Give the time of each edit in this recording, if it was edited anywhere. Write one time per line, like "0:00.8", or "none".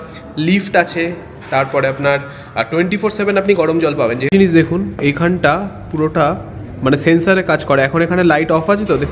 0:04.2